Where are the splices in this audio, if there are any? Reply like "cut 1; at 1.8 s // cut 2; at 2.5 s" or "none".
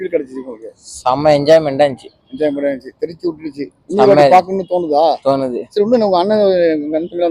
none

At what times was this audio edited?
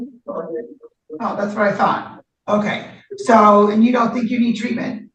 none

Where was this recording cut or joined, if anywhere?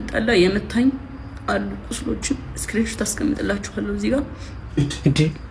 none

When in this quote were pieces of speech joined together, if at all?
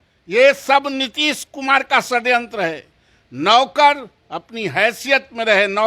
none

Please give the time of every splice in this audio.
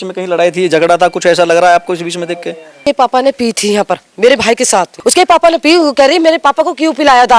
cut 1; at 2.8 s // cut 2; at 4.9 s

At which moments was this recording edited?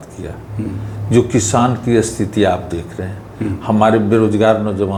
none

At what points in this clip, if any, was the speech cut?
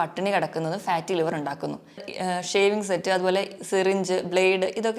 cut 1; at 2.1 s

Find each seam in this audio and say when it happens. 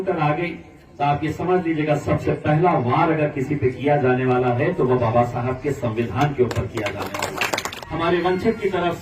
cut 1; at 7.7 s

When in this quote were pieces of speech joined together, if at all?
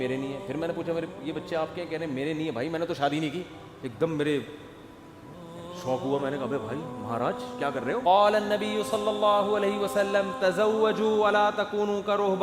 cut 1; at 8.0 s

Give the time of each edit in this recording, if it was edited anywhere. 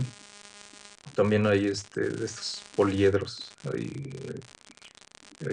cut 1; at 2.5 s

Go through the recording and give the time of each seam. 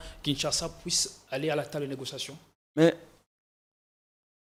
none

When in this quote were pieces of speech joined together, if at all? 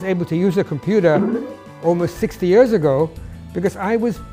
none

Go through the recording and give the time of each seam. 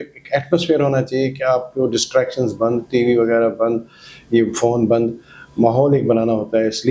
none

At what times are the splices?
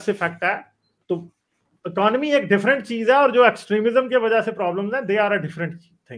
none

